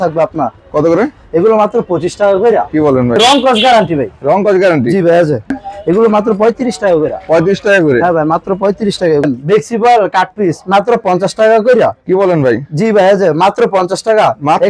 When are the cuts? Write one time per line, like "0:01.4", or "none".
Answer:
0:03.2
0:05.6
0:09.2